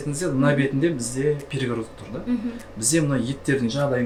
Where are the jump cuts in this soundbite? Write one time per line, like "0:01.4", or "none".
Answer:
none

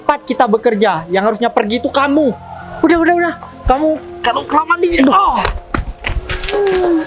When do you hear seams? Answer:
none

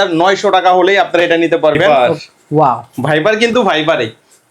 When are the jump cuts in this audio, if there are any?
0:01.9

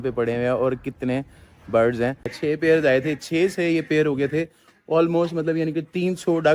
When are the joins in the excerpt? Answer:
0:02.3

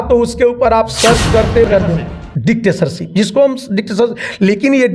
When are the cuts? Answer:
0:01.7

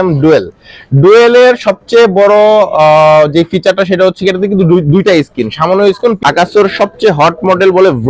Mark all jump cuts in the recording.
0:06.2

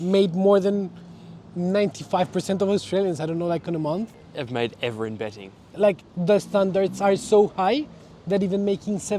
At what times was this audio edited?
0:05.7

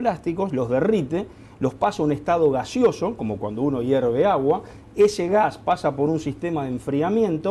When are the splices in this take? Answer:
none

